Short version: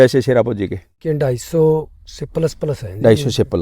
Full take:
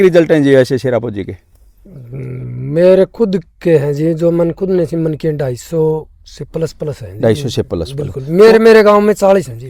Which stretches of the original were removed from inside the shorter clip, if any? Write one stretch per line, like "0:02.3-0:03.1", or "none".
0:01.6-0:05.2